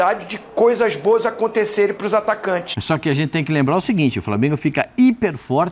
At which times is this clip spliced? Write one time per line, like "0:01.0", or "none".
0:02.7